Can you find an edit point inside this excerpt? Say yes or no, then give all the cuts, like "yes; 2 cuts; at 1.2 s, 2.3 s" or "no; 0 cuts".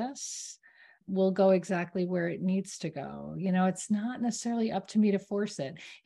yes; 1 cut; at 1.0 s